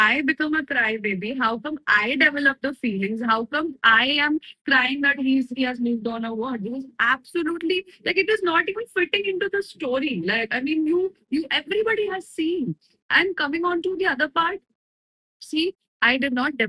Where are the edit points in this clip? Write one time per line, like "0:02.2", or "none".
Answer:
none